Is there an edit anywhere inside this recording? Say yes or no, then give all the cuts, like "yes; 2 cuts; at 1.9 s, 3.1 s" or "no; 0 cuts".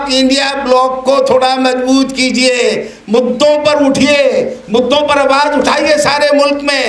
no; 0 cuts